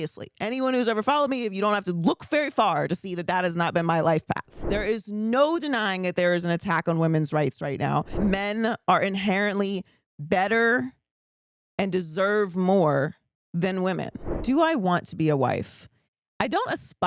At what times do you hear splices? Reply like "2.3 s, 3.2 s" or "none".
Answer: 4.6 s, 8.2 s, 14.2 s